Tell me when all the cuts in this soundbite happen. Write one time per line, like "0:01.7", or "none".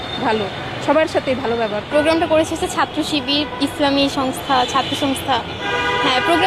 0:01.9